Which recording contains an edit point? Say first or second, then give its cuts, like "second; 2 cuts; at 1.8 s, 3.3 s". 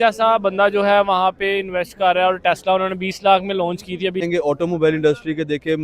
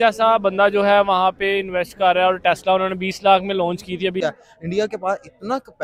first; 1 cut; at 4.2 s